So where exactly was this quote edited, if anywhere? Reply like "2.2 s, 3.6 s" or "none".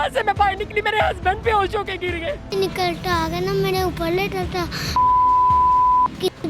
2.5 s